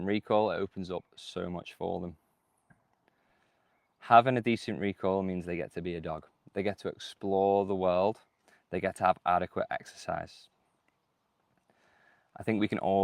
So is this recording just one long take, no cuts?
yes; 0 cuts

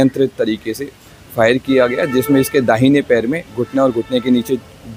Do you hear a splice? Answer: no; 0 cuts

